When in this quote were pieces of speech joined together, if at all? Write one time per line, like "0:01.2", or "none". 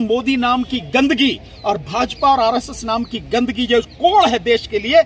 none